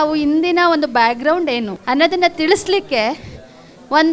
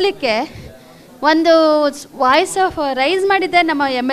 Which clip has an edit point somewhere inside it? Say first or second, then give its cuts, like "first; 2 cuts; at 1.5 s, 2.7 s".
first; 1 cut; at 1.7 s